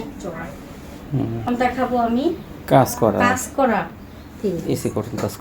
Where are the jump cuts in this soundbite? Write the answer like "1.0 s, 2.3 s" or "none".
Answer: 1.4 s